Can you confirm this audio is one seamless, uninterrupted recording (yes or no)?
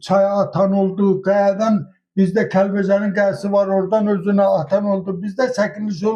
yes